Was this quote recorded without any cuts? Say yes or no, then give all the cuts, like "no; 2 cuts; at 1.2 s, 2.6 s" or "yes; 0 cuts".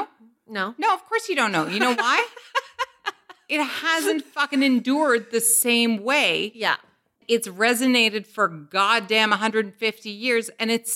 no; 1 cut; at 7.2 s